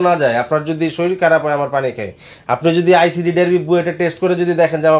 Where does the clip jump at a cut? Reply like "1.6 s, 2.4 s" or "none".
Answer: none